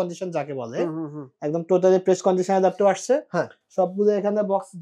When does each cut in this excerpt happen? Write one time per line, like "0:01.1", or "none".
none